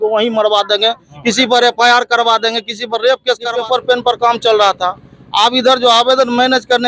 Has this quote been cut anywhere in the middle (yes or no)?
yes